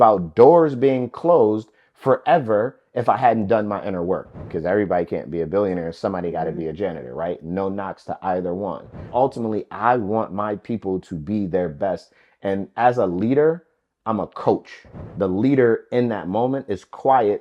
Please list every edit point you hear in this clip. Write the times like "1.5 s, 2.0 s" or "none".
4.5 s, 9.1 s, 15.0 s